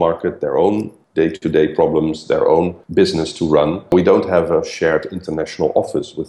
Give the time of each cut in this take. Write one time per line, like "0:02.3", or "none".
0:03.9